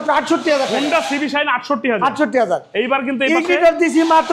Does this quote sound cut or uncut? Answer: uncut